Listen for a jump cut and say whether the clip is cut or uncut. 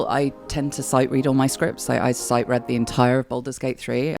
uncut